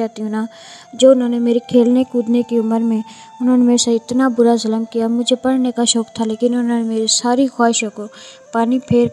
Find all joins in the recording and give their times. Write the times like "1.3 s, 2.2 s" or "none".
none